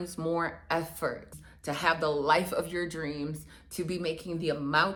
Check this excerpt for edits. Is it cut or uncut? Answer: uncut